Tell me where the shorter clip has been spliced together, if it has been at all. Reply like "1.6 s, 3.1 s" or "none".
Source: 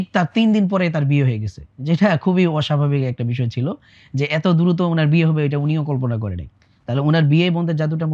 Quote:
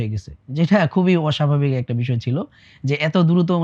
none

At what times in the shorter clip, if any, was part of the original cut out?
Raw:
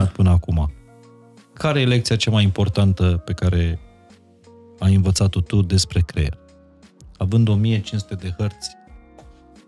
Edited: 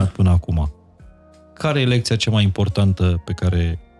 none

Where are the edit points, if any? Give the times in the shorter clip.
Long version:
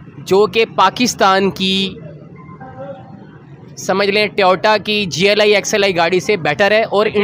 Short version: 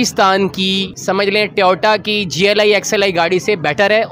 0.9 s

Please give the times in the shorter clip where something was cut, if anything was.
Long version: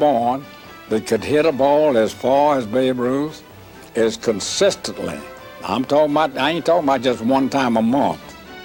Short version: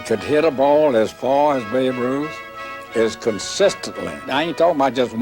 4.3 s

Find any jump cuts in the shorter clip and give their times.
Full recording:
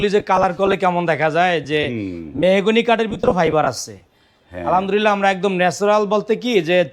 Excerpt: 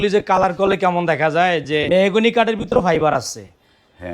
1.9 s

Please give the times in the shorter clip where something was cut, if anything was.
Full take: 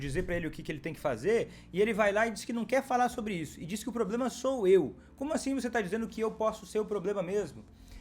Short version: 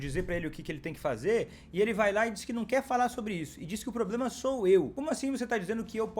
4.9 s

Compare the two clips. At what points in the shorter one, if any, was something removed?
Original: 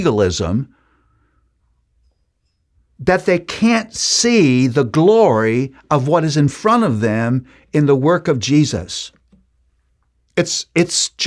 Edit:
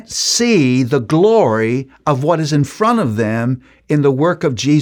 none

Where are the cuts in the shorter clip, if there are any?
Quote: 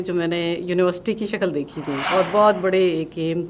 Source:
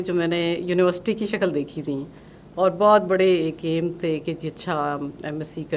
2.0 s

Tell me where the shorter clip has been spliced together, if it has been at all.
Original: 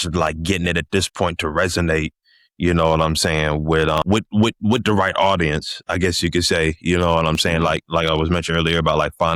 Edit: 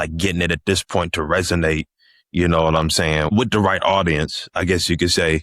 3.2 s

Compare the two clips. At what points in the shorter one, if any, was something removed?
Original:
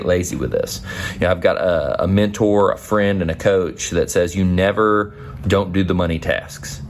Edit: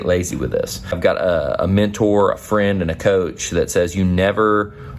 1.0 s

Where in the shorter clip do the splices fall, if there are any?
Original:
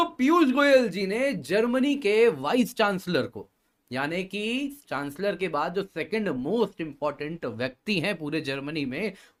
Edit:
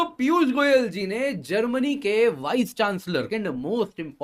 3.3 s

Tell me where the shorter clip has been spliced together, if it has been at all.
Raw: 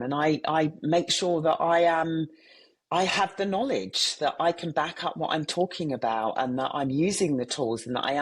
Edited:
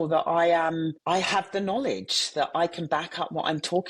1.0 s

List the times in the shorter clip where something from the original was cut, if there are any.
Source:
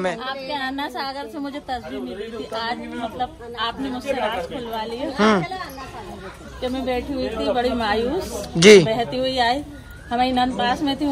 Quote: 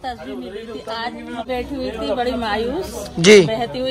1.5 s

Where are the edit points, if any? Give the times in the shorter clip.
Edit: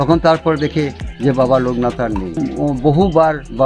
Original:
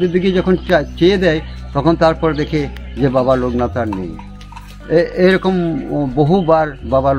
2.4 s

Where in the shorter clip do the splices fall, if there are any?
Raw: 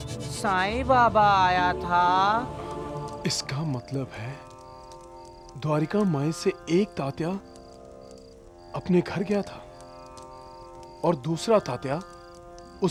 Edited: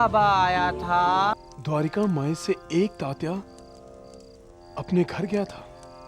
1.3 s

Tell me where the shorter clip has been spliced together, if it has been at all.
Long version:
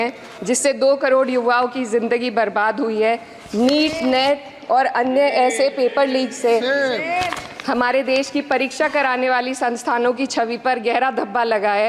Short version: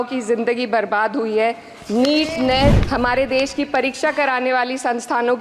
2.8 s

